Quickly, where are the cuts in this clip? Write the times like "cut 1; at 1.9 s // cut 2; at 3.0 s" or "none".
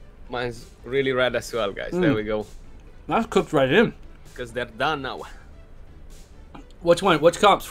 cut 1; at 4.2 s